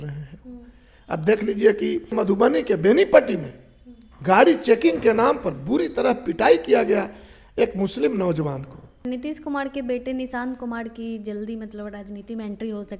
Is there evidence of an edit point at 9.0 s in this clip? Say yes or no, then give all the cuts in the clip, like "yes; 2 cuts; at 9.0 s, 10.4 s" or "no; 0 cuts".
yes; 2 cuts; at 2.1 s, 9.0 s